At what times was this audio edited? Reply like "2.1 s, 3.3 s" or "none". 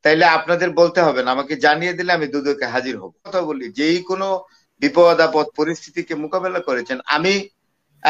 3.3 s